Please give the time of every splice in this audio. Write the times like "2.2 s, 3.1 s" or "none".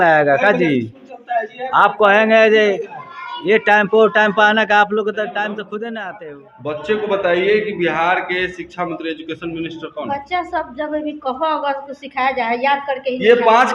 6.1 s